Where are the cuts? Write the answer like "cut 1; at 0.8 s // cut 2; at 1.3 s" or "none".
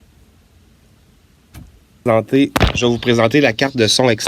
cut 1; at 2.0 s